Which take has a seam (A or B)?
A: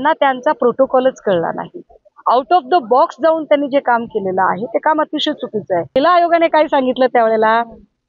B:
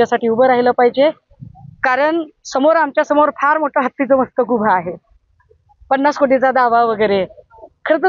A